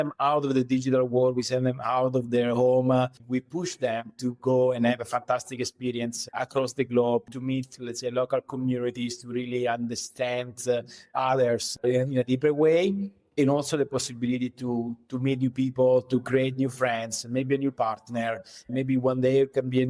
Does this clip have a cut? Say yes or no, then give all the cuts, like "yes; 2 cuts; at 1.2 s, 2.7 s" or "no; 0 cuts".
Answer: yes; 3 cuts; at 3.2 s, 7.3 s, 11.8 s